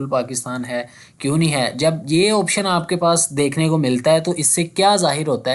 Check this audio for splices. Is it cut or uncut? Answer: uncut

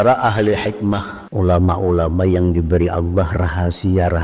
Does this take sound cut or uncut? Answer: cut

